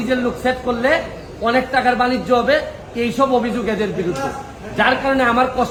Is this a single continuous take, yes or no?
yes